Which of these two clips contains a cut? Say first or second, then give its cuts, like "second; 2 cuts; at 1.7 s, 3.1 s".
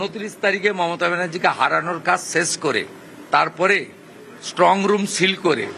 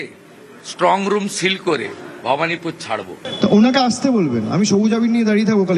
second; 1 cut; at 3.2 s